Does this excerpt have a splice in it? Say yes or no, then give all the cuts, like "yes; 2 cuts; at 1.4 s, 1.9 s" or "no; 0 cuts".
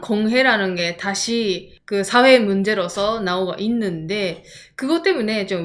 no; 0 cuts